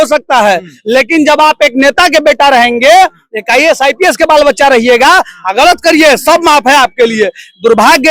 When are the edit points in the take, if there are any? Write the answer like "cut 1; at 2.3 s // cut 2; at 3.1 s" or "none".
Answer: none